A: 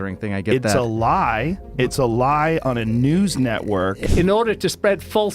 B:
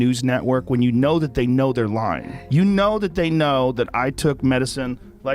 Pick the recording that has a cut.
A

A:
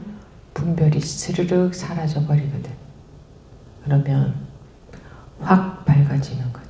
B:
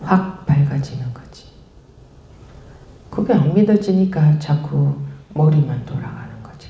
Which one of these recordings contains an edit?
B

